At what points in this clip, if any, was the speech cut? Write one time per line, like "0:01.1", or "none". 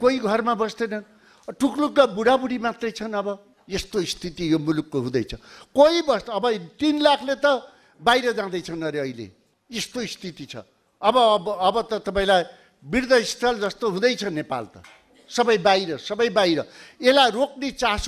none